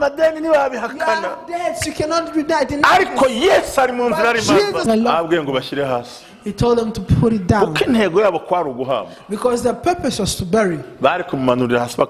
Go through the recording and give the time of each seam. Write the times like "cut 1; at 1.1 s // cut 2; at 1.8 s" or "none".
cut 1; at 4.9 s